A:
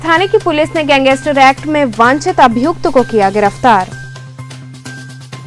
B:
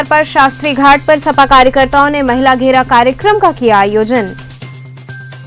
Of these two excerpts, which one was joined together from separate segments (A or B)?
B